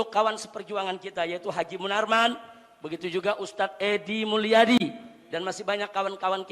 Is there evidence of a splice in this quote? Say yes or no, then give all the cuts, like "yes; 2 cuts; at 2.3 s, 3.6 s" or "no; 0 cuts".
no; 0 cuts